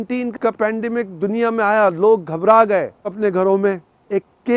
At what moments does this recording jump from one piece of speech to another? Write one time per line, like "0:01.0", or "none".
none